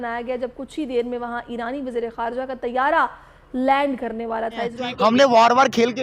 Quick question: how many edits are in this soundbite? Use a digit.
1